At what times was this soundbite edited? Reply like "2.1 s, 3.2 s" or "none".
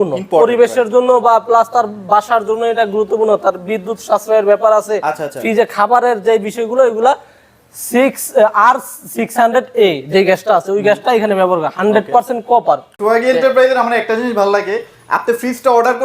12.9 s